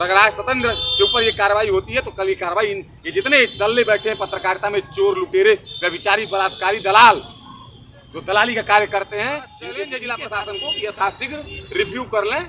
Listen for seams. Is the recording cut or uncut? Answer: cut